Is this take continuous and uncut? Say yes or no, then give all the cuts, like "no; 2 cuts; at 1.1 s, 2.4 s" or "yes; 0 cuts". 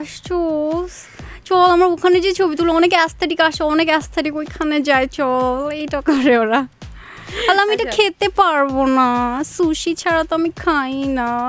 yes; 0 cuts